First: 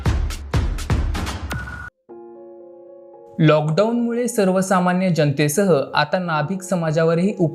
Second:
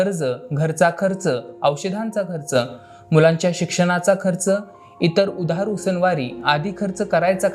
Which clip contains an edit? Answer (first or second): first